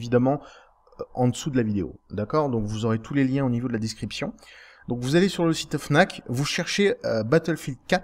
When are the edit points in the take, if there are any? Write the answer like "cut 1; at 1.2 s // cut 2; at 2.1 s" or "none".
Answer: cut 1; at 5.8 s

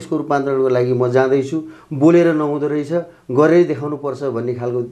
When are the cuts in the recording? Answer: none

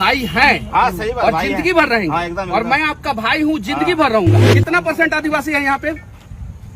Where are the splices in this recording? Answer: cut 1; at 4.5 s

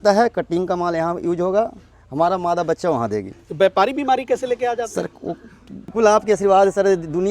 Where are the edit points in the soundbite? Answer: cut 1; at 5.9 s

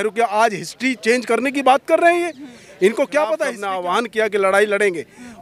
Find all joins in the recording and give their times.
cut 1; at 3.6 s

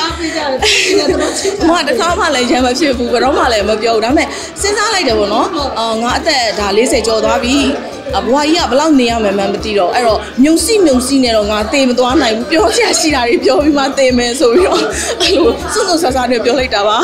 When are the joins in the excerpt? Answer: none

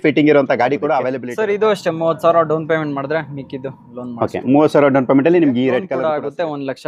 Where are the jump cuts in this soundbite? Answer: cut 1; at 1.2 s // cut 2; at 5.9 s

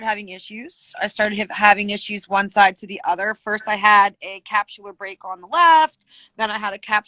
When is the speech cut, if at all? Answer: none

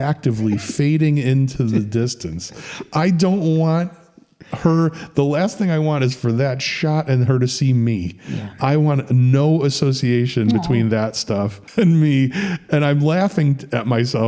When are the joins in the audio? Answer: cut 1; at 11.6 s

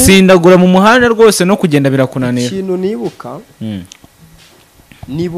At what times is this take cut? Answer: none

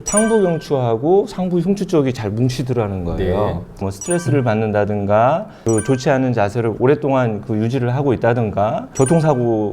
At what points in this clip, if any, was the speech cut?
cut 1; at 3.9 s // cut 2; at 5.5 s

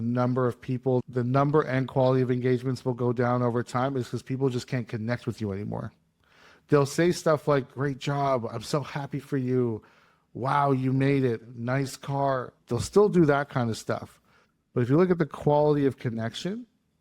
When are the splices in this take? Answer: cut 1; at 1.0 s

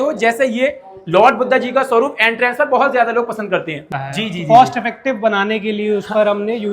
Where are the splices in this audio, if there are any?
cut 1; at 3.9 s

